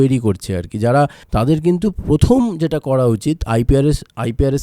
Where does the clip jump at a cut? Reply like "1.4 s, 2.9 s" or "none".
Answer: 1.2 s